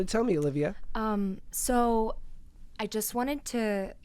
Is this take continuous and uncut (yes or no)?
yes